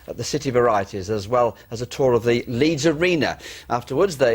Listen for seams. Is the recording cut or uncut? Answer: cut